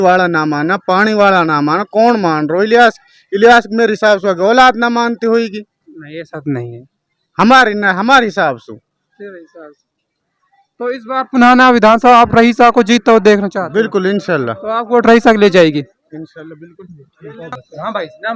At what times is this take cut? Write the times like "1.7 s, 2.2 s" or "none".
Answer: none